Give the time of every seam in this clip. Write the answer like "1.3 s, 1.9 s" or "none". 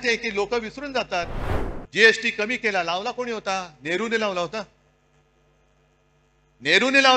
1.4 s